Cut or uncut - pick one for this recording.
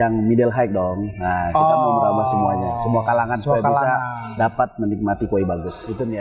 uncut